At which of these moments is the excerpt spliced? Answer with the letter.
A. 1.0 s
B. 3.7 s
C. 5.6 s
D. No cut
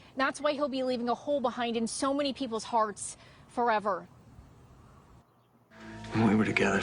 C